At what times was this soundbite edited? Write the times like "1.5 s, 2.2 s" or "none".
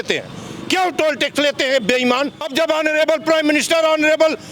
2.4 s